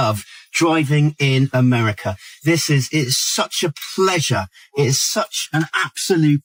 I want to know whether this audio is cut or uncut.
uncut